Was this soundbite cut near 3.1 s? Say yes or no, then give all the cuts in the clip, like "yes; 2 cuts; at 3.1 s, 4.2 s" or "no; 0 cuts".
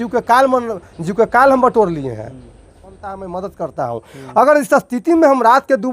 yes; 1 cut; at 3.1 s